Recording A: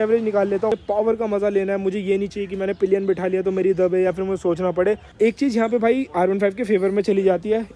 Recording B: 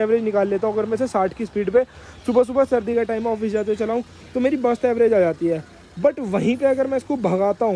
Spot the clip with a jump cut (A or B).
A